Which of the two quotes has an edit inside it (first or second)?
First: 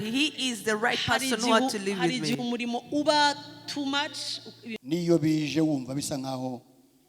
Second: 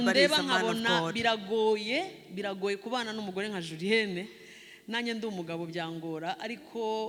first